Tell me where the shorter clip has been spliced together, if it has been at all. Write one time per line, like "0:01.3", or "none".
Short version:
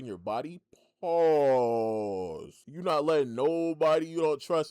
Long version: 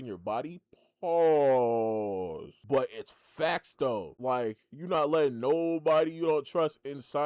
0:02.6